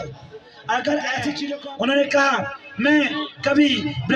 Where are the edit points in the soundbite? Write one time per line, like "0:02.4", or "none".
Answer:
0:01.5